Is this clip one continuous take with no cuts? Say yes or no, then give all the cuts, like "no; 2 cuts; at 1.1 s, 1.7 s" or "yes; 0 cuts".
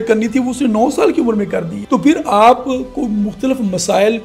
no; 1 cut; at 1.8 s